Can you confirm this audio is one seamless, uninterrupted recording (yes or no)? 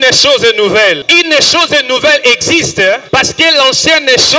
no